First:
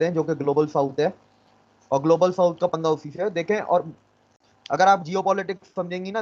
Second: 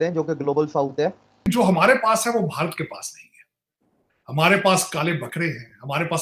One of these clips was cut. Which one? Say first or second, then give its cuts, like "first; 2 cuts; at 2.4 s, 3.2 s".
second; 1 cut; at 1.5 s